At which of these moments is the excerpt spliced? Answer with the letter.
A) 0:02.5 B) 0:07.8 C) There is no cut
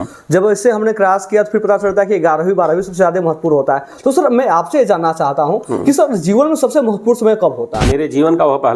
B